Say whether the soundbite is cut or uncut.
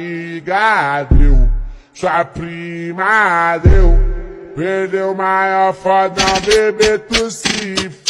uncut